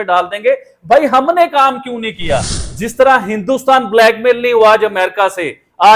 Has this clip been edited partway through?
yes; 1 cut; at 2.6 s

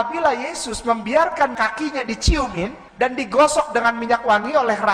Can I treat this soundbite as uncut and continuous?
no; 2 cuts; at 1.5 s, 2.8 s

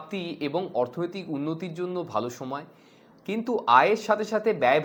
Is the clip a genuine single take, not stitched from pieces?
yes; 0 cuts

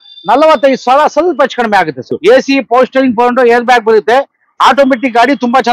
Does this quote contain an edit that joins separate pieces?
yes; 1 cut; at 2.2 s

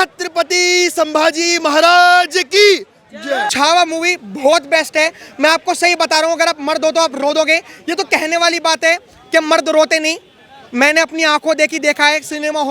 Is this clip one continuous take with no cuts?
no; 1 cut; at 3.5 s

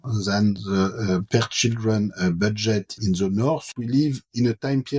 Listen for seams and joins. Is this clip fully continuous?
no; 1 cut; at 3.7 s

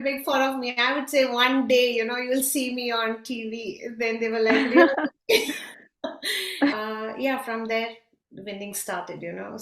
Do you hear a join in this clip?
yes; 1 cut; at 6.7 s

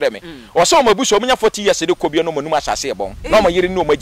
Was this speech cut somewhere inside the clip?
yes; 1 cut; at 3.1 s

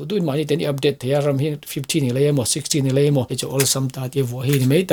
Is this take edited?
no; 0 cuts

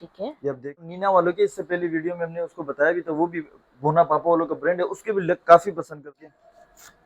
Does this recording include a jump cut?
yes; 2 cuts; at 0.9 s, 6.0 s

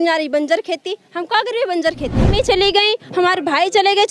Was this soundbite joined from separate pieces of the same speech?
yes; 1 cut; at 2.3 s

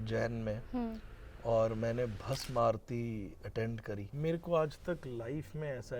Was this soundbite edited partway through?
yes; 1 cut; at 4.1 s

